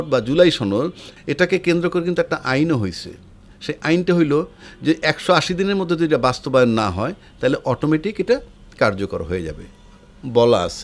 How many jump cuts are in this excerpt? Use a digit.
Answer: 1